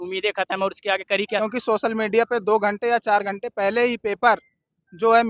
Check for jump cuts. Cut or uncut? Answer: cut